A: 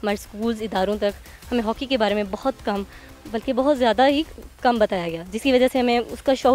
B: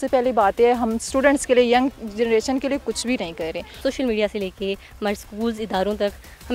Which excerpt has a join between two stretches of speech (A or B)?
B